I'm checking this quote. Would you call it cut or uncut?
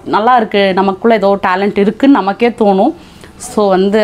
uncut